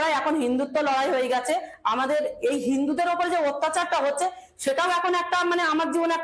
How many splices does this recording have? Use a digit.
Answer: 0